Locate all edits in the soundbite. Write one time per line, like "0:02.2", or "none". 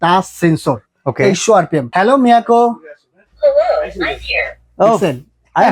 0:01.9